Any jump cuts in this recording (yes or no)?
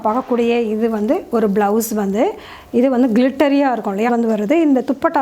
yes